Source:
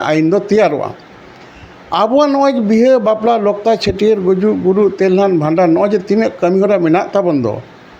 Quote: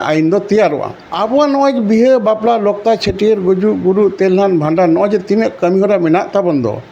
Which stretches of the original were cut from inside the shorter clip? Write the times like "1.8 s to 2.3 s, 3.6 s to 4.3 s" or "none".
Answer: 1.0 s to 1.8 s